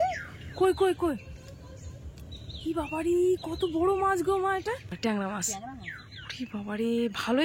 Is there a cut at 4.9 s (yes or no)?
yes